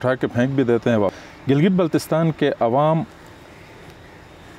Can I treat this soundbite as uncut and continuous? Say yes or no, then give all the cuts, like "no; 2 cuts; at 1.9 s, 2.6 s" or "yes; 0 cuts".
no; 1 cut; at 1.1 s